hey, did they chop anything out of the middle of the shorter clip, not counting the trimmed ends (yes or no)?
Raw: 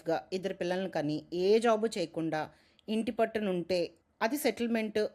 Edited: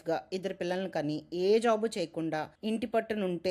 yes